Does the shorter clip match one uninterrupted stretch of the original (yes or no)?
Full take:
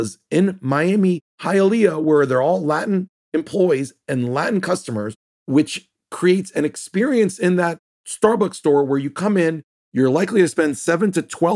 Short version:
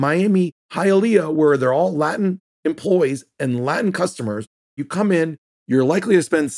no